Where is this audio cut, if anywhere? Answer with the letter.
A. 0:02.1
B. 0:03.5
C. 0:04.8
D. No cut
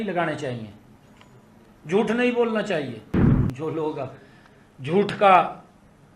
B